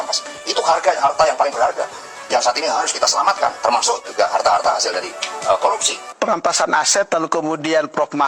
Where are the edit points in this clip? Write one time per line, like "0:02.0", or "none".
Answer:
0:06.0